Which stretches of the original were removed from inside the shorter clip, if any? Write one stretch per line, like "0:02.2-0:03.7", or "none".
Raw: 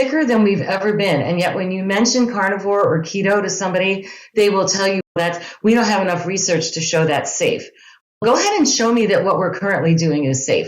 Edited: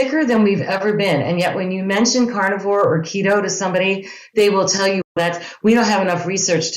none